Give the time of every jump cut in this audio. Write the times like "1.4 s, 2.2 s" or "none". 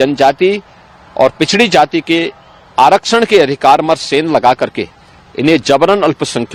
none